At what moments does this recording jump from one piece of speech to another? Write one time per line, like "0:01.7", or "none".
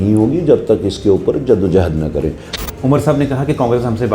0:02.5